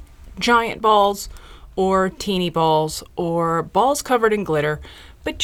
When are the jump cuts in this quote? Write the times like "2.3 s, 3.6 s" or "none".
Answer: none

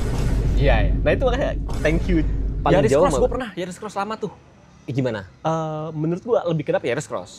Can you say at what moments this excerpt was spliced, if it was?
2.4 s

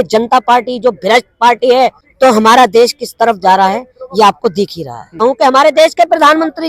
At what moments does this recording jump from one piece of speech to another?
2.0 s, 5.2 s

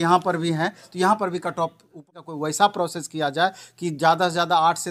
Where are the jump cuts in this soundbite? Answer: 2.0 s

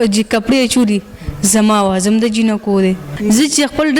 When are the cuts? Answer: 3.1 s

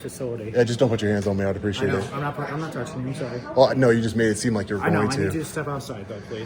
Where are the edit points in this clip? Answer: none

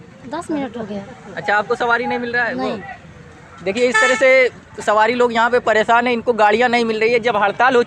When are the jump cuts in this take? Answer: none

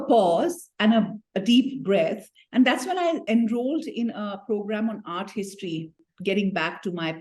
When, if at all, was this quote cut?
6.1 s

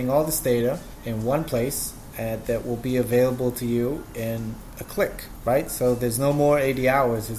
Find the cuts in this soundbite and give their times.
0.9 s

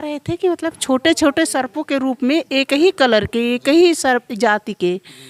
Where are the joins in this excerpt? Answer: none

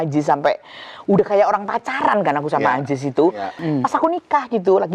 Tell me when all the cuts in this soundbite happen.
3.6 s

